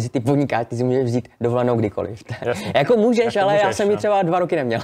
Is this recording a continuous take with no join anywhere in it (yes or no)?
yes